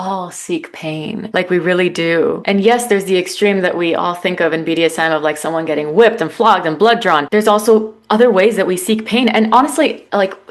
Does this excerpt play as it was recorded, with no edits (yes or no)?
no